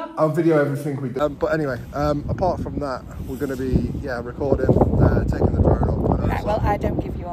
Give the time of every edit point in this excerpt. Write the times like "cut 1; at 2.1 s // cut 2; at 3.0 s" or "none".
cut 1; at 1.2 s